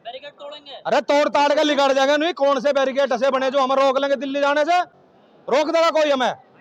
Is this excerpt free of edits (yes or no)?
yes